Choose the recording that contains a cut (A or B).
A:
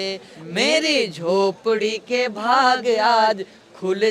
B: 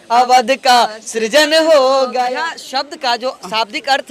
B